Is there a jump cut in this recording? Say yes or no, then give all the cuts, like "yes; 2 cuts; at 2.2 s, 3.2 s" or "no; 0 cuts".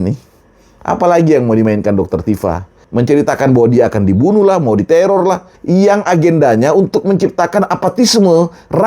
yes; 2 cuts; at 2.8 s, 5.5 s